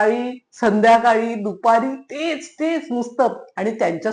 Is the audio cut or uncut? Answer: uncut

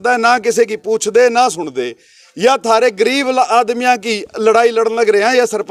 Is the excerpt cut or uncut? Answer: uncut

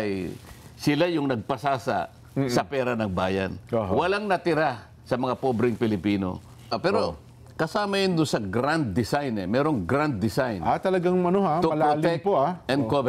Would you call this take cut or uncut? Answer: cut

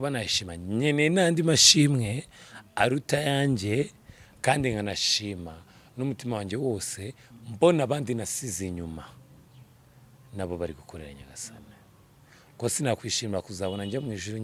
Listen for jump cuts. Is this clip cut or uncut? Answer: uncut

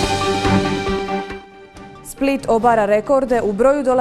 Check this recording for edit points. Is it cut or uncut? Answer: cut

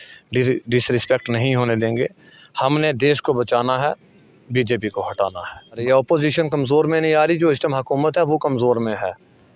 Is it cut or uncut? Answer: cut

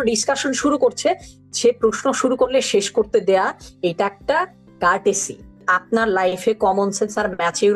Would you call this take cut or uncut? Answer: cut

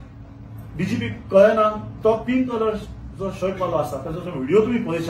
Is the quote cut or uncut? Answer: uncut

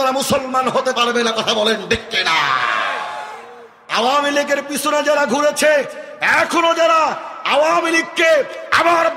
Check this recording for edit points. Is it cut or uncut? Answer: cut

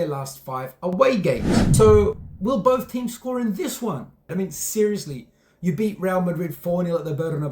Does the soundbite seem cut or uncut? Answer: cut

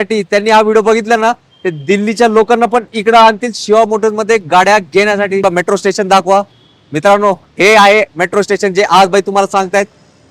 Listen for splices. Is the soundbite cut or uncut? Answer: cut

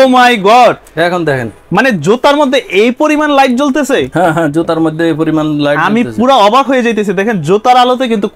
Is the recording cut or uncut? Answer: uncut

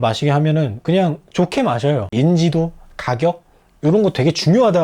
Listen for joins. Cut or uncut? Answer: cut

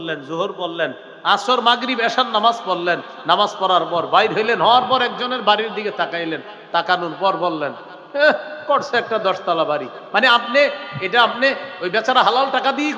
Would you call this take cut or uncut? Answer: uncut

